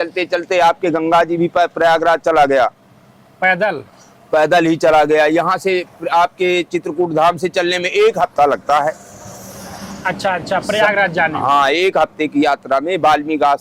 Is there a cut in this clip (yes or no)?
no